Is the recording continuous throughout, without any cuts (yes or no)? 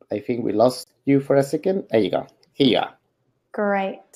yes